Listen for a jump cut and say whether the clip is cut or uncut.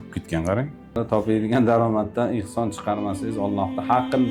cut